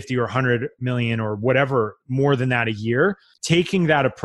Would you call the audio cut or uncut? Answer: cut